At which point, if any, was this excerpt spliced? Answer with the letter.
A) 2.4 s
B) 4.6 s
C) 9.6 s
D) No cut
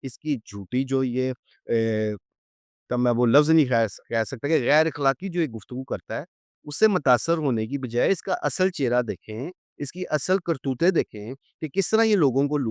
D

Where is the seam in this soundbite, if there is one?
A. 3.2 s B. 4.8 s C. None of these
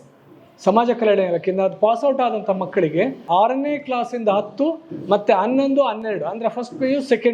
A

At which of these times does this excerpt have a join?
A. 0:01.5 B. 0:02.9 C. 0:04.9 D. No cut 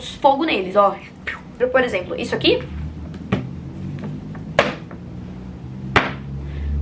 A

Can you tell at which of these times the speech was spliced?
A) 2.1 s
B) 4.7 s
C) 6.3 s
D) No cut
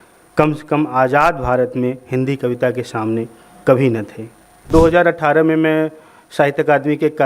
B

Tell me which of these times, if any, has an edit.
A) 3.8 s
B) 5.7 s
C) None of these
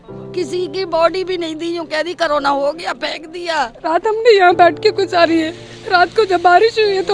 A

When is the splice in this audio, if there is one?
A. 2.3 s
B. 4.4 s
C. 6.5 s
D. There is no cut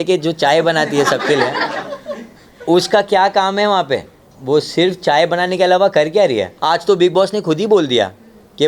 C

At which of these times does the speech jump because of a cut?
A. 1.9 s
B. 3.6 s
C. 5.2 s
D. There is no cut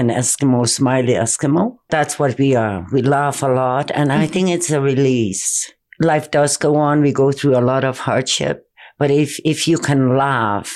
A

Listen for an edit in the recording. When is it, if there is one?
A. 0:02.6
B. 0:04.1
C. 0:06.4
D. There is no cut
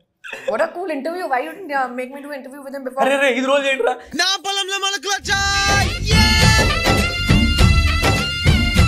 D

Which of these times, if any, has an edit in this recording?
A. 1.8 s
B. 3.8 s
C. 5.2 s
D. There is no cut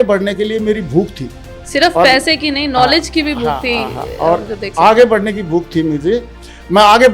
D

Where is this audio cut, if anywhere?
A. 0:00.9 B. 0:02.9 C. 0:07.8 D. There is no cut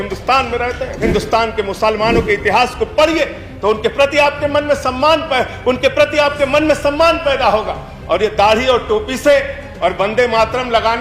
A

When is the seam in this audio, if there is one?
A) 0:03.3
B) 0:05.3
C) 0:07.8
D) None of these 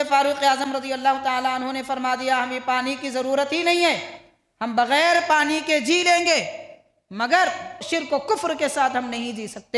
C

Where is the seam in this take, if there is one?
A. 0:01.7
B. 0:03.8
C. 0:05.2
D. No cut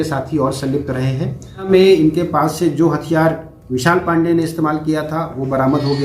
A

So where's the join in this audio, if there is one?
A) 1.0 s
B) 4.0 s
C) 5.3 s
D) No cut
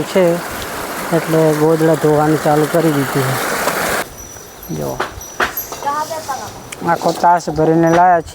B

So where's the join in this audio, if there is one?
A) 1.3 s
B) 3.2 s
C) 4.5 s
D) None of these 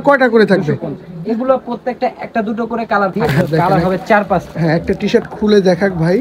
B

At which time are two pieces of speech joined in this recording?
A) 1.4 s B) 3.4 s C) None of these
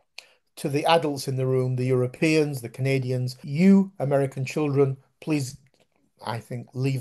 B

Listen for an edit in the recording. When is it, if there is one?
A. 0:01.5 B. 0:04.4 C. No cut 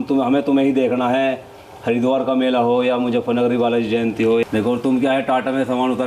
B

